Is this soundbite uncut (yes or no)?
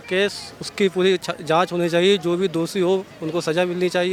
yes